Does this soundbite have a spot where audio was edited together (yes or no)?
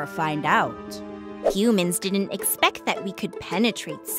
yes